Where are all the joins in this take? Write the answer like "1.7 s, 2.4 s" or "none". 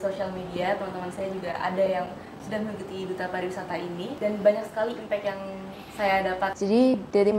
4.1 s, 6.5 s